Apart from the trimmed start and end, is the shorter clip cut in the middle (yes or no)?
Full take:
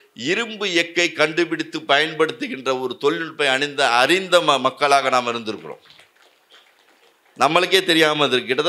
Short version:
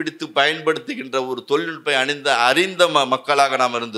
no